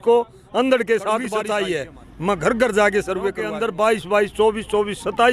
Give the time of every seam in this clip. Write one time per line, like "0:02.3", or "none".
0:01.4
0:03.5